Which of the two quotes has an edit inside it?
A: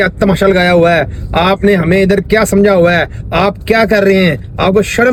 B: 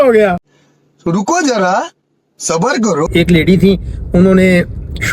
B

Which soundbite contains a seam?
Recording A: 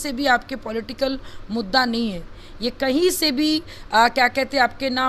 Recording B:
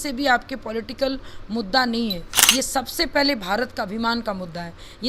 B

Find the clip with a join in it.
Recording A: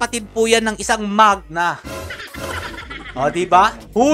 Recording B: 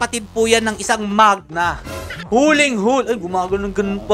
B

